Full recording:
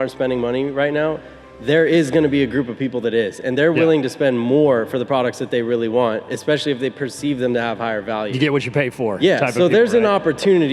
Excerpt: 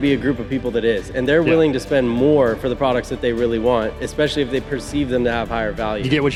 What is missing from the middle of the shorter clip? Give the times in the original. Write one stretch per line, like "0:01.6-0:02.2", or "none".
none